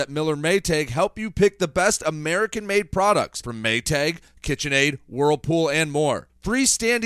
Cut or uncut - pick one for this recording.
uncut